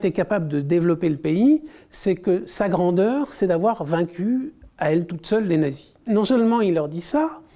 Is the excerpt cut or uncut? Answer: cut